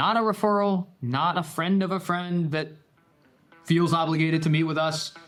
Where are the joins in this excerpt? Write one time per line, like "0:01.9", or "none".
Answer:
none